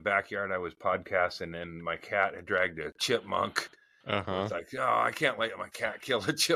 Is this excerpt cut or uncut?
uncut